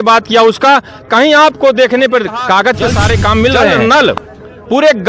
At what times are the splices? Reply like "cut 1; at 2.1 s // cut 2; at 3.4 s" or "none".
cut 1; at 3.8 s

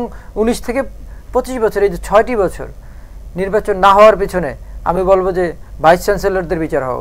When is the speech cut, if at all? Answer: none

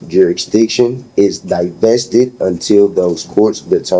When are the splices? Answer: none

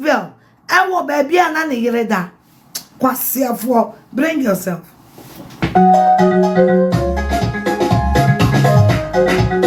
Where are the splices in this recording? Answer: none

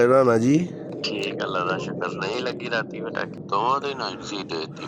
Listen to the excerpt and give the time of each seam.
cut 1; at 0.9 s

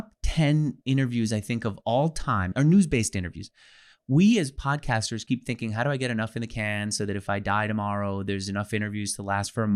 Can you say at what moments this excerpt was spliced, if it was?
cut 1; at 2.5 s

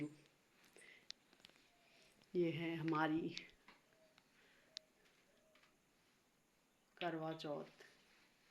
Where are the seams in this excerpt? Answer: none

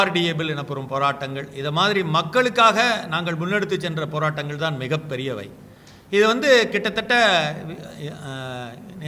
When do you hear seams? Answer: none

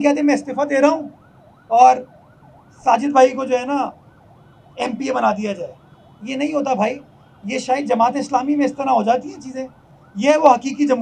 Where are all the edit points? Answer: none

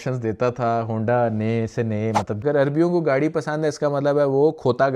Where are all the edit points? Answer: cut 1; at 2.4 s

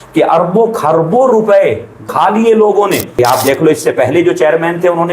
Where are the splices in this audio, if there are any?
cut 1; at 2.1 s // cut 2; at 3.2 s

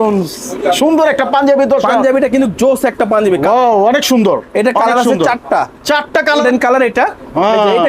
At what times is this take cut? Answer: cut 1; at 3.4 s // cut 2; at 6.4 s

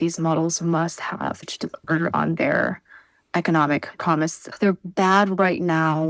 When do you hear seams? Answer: cut 1; at 1.4 s // cut 2; at 4.4 s

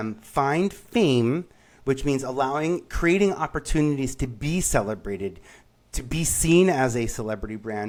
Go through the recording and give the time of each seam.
none

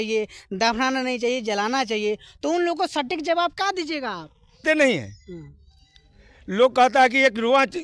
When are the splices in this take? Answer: cut 1; at 4.6 s

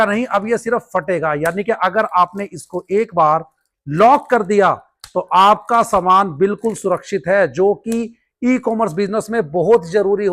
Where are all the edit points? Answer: none

